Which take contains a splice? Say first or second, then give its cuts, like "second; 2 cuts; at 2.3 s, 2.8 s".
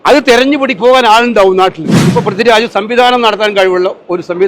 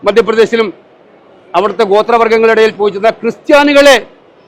first; 1 cut; at 1.9 s